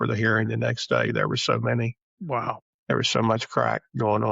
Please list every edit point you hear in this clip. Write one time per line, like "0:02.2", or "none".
0:02.5

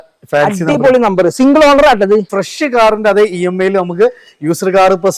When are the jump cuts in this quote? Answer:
0:02.3

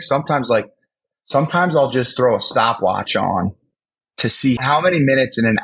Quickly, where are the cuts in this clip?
0:04.6

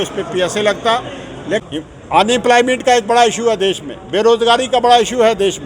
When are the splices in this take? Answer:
0:01.6

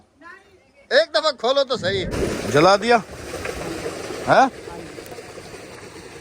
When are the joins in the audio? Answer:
0:02.2

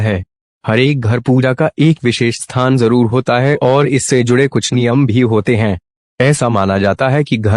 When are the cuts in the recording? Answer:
none

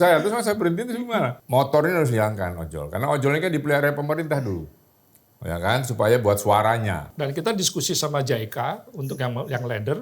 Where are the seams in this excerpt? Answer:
0:01.4
0:07.1

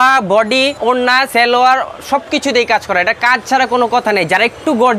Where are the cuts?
0:01.2

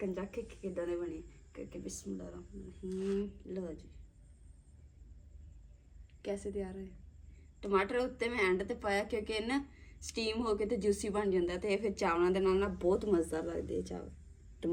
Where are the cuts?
none

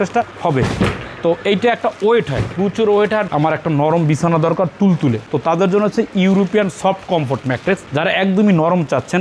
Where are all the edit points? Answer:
0:03.3

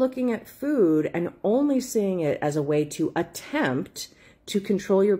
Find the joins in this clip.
none

